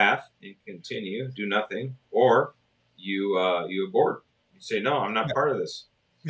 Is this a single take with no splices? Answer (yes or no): yes